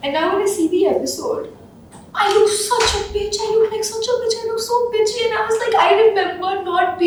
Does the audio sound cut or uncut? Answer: uncut